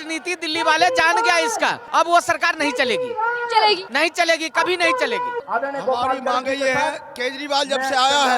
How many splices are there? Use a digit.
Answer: 3